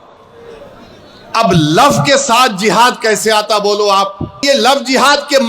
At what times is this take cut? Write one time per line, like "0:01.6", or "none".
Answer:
0:04.4